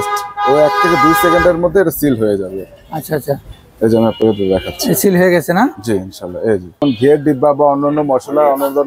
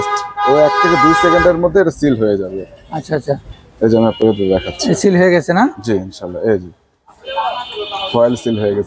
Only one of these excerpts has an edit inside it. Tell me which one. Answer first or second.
first